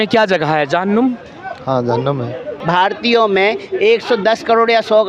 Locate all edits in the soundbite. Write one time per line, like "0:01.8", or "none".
0:02.5